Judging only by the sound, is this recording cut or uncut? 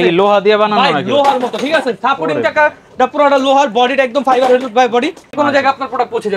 cut